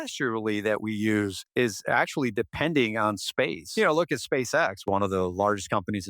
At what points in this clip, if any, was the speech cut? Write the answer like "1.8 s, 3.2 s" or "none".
1.4 s, 3.6 s, 4.8 s